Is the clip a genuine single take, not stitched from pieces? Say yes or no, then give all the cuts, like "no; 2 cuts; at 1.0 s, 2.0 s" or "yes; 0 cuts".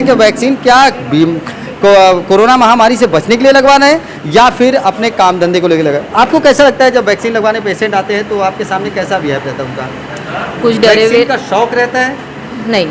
yes; 0 cuts